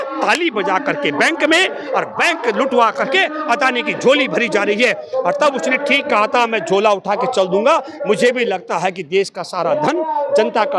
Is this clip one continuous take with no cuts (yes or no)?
yes